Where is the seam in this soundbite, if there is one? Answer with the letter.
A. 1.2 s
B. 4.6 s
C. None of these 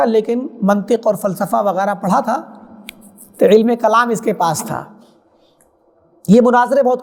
C